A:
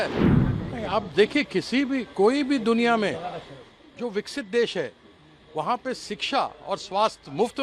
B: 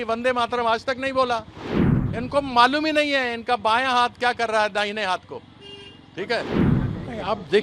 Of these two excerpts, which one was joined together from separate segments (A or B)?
B